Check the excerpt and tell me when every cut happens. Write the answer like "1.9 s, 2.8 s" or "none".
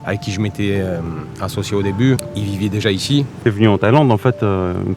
2.3 s, 3.3 s